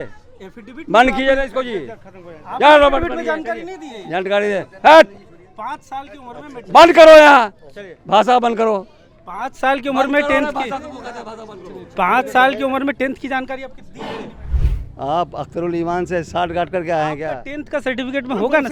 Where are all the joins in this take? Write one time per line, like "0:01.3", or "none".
0:14.4